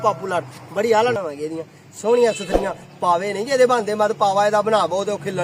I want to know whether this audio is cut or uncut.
cut